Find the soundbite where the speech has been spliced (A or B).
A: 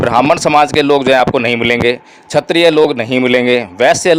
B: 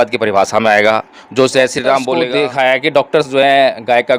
B